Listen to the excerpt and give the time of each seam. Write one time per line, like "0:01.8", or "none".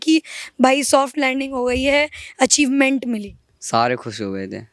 none